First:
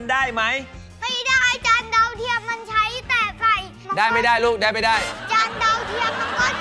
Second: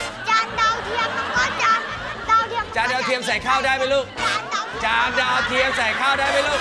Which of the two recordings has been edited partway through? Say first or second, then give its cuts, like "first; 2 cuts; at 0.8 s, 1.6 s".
first; 1 cut; at 3.9 s